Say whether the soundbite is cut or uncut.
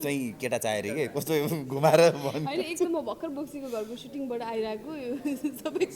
uncut